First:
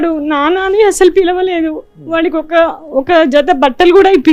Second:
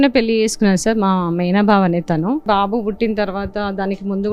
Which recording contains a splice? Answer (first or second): second